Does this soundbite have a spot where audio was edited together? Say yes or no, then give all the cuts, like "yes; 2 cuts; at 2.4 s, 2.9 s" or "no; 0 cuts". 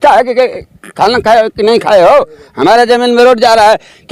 no; 0 cuts